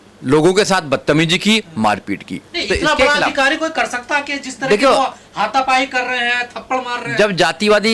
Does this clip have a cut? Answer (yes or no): no